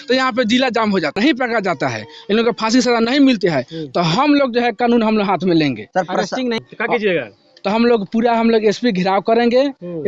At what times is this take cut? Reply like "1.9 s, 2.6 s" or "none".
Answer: 1.2 s, 6.6 s